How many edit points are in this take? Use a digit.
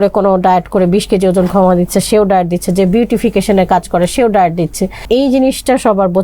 1